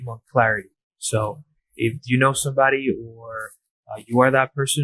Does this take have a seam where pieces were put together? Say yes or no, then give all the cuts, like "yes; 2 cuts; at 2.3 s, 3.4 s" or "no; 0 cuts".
no; 0 cuts